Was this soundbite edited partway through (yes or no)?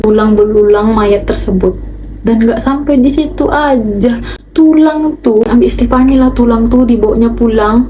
yes